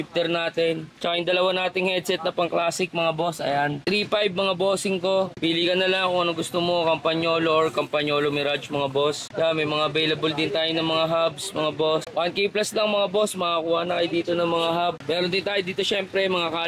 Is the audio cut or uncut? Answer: uncut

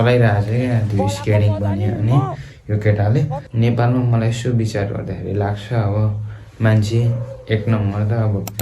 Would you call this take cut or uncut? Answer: cut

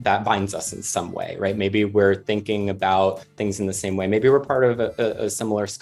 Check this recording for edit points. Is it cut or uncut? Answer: cut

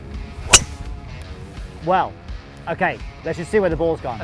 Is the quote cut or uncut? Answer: uncut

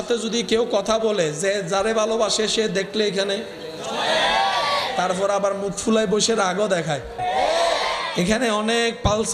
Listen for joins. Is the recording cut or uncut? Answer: cut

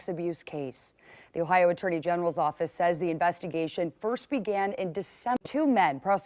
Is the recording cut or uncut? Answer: cut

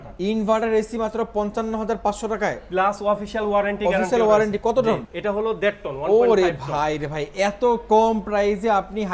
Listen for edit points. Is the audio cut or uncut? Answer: cut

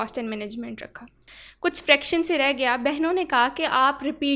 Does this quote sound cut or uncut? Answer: cut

